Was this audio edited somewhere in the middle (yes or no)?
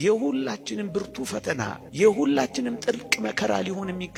no